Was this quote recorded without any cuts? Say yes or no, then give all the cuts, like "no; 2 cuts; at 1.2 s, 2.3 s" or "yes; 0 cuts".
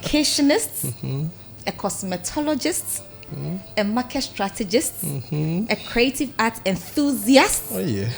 yes; 0 cuts